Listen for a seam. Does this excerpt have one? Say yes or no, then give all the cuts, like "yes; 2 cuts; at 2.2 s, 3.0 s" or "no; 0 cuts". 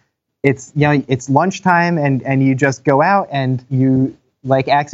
yes; 1 cut; at 3.7 s